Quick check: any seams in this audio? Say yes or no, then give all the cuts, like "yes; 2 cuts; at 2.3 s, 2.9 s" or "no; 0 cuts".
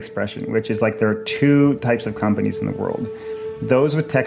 no; 0 cuts